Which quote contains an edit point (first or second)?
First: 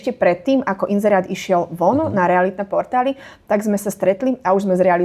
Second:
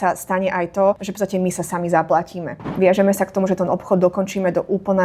second